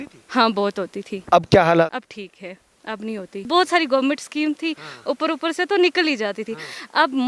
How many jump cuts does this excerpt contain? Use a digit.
2